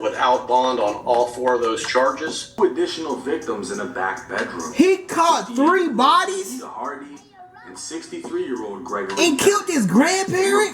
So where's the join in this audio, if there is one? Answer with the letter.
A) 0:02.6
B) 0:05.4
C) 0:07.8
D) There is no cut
A